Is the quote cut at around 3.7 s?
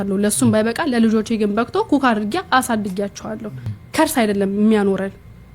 yes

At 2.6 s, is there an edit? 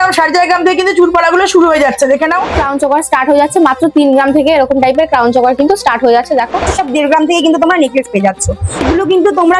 yes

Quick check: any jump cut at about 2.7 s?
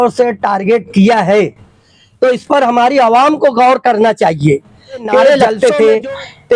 no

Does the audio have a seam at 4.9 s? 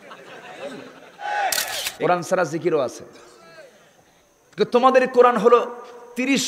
no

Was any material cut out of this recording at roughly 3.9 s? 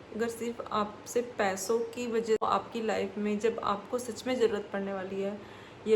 no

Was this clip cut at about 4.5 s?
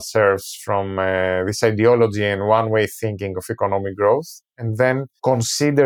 no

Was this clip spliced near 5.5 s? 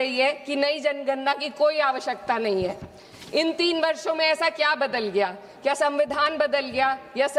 no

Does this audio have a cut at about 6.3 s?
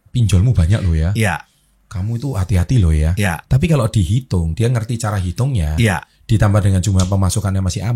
no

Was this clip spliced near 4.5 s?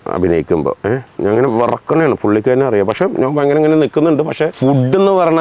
yes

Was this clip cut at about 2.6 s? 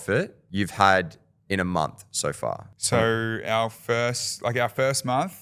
no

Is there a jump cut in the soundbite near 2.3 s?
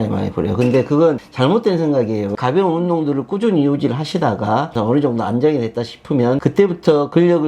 yes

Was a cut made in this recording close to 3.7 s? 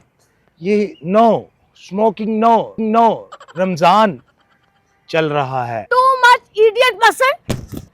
no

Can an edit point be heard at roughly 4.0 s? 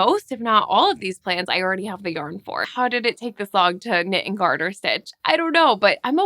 no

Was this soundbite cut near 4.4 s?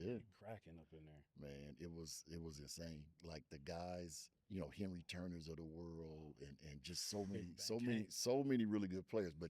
yes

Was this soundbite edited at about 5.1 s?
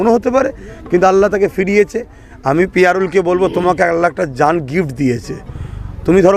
no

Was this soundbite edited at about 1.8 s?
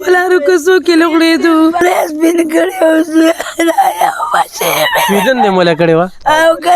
yes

